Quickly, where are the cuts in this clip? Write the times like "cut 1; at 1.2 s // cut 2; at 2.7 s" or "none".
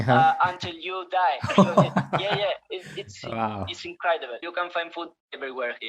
cut 1; at 4.4 s